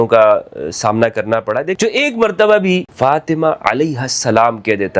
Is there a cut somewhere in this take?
yes; 2 cuts; at 1.8 s, 2.9 s

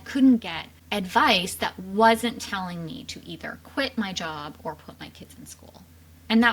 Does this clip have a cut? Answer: no; 0 cuts

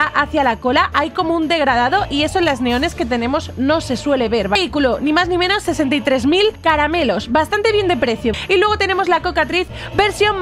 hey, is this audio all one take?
no; 3 cuts; at 4.6 s, 6.6 s, 8.3 s

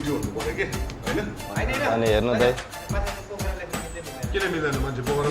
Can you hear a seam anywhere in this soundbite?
yes; 1 cut; at 1.5 s

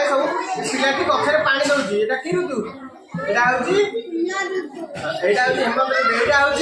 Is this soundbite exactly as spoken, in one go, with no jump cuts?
yes; 0 cuts

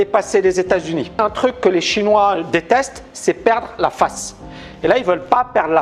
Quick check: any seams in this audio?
yes; 1 cut; at 1.2 s

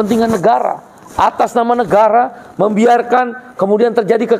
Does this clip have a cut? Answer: no; 0 cuts

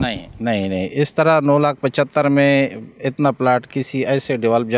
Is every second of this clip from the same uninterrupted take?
yes; 0 cuts

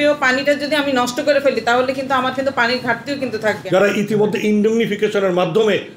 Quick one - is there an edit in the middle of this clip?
yes; 1 cut; at 3.6 s

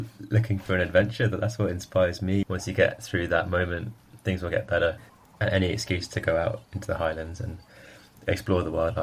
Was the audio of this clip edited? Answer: yes; 2 cuts; at 2.4 s, 5.1 s

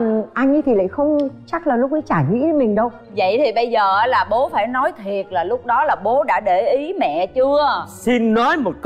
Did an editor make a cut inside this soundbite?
no; 0 cuts

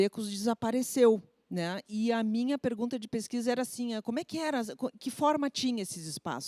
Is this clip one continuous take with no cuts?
yes; 0 cuts

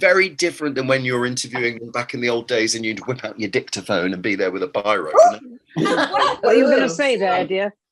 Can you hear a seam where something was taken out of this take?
no; 0 cuts

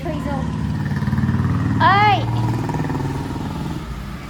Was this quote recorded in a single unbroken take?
yes; 0 cuts

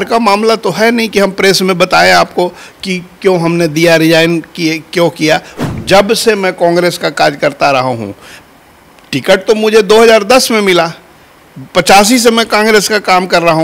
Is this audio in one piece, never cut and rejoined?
no; 1 cut; at 5.5 s

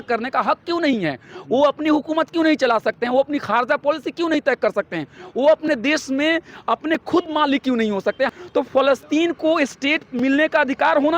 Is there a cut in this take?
yes; 1 cut; at 8.3 s

